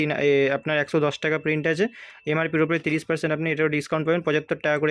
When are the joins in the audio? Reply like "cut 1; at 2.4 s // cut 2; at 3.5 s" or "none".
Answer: none